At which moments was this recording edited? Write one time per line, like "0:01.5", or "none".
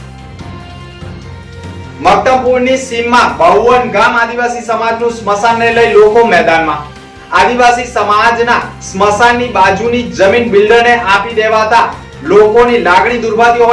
0:01.7